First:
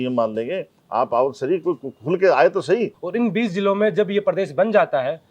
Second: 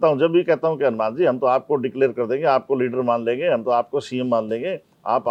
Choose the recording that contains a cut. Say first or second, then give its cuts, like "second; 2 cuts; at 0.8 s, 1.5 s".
first; 1 cut; at 3.0 s